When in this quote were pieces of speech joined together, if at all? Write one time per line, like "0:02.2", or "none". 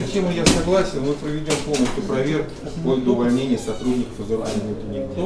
none